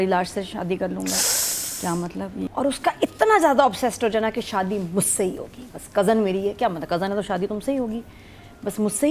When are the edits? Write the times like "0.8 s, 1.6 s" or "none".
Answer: 2.5 s